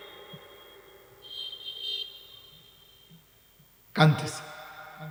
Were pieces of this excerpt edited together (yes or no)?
no